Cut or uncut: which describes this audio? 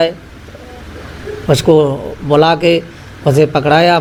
uncut